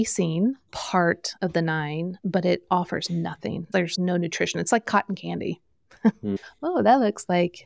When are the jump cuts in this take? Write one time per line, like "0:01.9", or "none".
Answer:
0:01.3
0:02.2